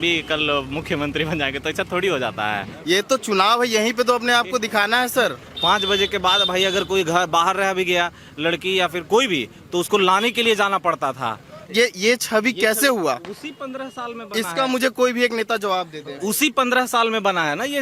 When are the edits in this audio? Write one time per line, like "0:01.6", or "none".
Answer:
0:02.7
0:05.5
0:11.6